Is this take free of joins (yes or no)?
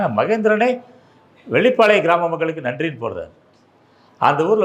yes